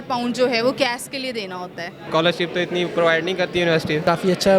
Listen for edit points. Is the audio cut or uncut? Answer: cut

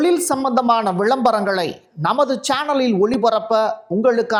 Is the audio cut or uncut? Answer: uncut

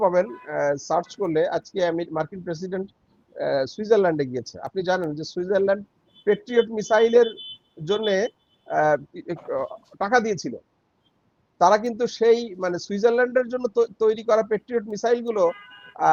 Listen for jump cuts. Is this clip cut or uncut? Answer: uncut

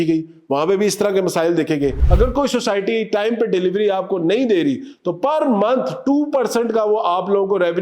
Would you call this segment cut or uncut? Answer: cut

